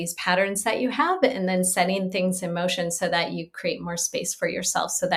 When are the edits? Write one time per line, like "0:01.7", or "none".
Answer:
none